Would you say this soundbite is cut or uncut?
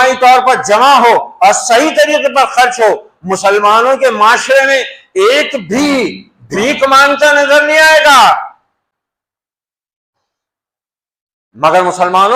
uncut